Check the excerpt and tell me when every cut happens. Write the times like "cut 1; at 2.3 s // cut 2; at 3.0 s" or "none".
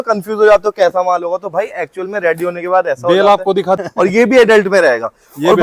cut 1; at 3.9 s